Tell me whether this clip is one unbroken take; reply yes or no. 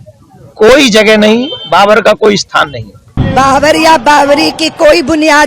no